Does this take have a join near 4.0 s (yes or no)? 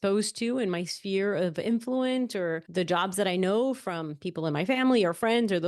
no